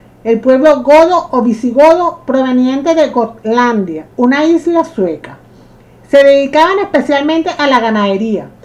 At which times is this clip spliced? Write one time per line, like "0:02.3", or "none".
none